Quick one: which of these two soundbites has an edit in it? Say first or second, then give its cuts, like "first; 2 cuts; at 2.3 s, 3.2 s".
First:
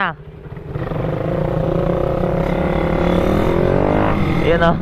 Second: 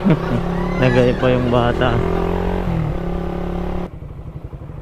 second; 1 cut; at 3.9 s